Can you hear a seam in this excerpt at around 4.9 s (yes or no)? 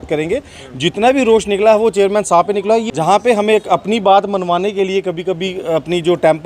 no